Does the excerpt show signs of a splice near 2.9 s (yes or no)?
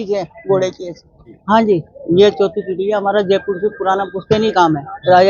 no